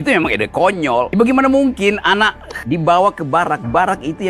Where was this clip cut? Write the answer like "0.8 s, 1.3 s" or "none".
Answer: none